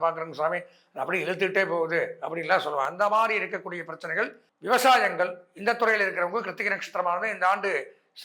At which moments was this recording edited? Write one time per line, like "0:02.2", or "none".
0:04.5